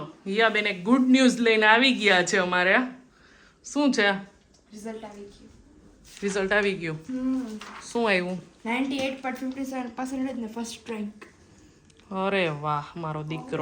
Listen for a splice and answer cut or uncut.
uncut